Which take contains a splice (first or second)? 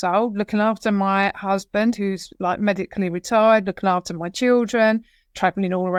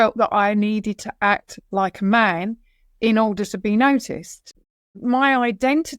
second